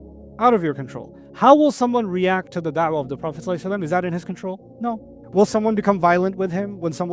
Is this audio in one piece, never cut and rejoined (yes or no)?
no